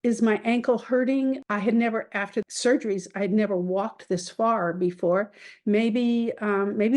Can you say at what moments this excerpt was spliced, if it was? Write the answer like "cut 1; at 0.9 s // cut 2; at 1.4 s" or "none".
cut 1; at 1.4 s // cut 2; at 2.5 s